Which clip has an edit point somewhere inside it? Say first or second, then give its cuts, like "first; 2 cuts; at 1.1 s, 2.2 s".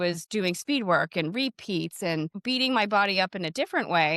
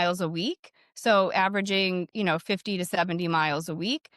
first; 1 cut; at 2.4 s